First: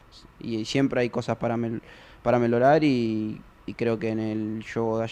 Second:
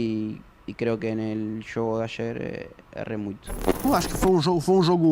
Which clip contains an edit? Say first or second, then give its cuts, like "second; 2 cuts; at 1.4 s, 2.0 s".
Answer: second; 1 cut; at 3.8 s